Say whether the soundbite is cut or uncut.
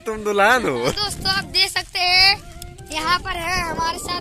cut